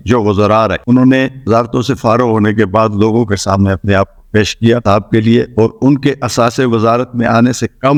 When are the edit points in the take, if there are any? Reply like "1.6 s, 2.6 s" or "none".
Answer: none